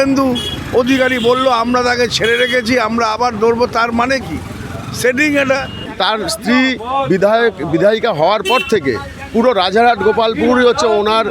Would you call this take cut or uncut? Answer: cut